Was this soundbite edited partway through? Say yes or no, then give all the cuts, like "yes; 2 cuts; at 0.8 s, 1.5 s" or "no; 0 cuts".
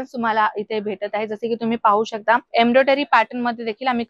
yes; 1 cut; at 2.5 s